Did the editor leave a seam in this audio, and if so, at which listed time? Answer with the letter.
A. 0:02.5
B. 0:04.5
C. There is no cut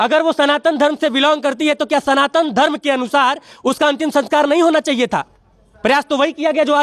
C